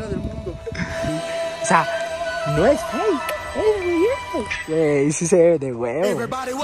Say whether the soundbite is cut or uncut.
uncut